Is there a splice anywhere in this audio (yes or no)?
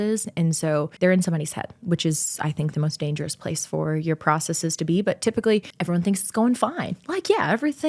yes